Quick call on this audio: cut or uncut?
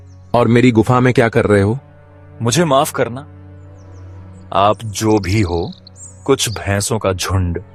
uncut